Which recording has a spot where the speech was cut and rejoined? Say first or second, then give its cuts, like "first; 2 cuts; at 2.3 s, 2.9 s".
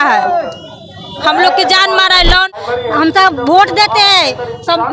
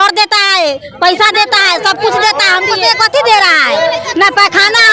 first; 1 cut; at 2.6 s